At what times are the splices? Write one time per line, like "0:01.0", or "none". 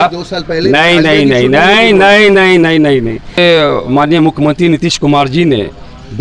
0:03.4